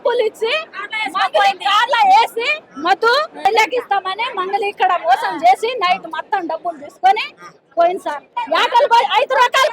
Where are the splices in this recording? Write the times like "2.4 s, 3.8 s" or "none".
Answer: 3.4 s, 8.3 s